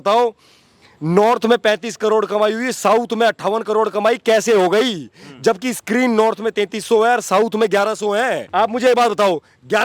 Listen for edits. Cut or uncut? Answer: cut